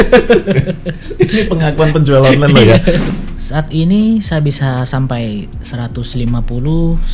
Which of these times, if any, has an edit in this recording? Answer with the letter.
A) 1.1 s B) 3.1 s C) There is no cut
B